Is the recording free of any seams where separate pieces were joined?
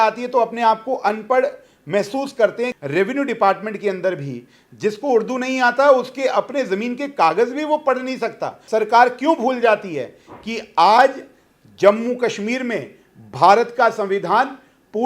no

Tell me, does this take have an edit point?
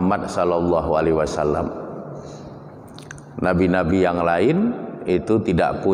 no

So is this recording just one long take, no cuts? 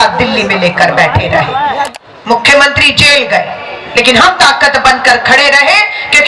no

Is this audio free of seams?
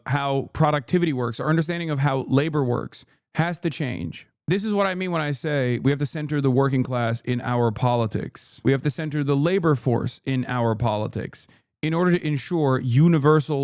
yes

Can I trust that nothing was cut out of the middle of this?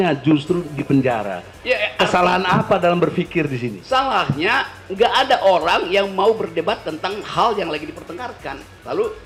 yes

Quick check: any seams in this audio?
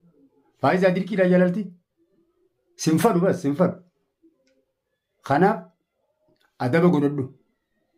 no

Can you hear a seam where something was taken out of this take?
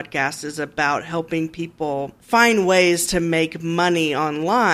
no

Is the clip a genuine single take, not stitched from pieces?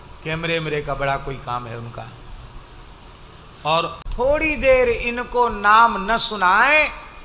no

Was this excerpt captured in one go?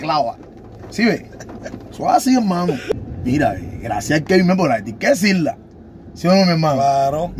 no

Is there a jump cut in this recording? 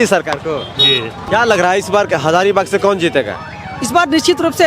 yes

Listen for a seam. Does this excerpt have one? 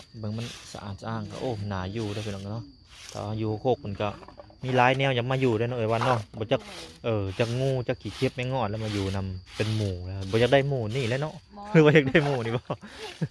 no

